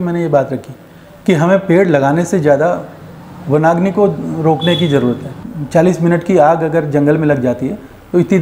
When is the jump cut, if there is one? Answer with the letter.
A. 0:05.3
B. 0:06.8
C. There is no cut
A